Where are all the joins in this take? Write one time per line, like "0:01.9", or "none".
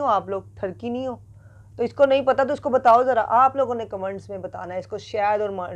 none